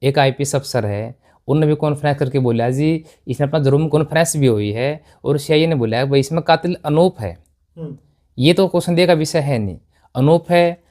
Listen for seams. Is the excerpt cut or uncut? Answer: cut